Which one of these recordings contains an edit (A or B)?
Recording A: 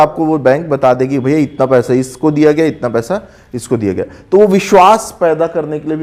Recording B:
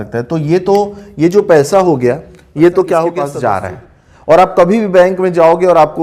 B